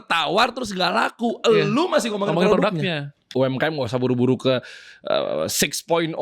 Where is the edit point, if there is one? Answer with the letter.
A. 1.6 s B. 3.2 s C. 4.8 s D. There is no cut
B